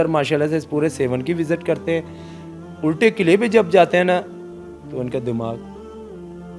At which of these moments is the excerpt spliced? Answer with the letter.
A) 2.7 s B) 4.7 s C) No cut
C